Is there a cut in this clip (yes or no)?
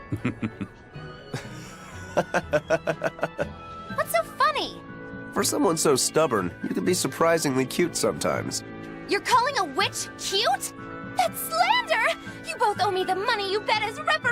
yes